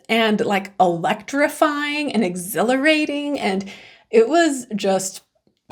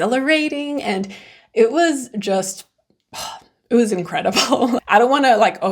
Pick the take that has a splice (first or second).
second